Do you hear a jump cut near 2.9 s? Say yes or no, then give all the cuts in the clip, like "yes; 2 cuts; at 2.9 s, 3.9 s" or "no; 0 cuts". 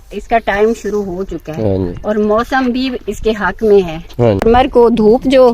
no; 1 cut; at 4.4 s